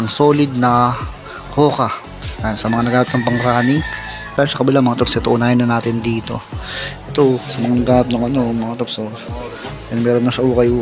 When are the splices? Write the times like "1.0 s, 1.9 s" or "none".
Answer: 4.4 s